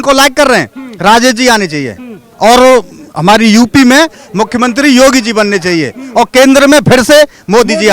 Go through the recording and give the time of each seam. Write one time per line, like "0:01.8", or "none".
none